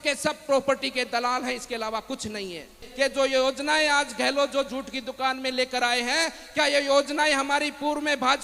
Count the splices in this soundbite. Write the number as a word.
one